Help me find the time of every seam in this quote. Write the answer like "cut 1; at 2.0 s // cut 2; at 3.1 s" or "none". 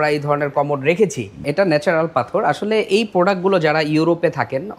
cut 1; at 1.4 s